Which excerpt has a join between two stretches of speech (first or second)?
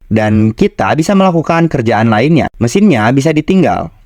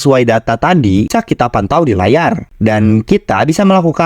second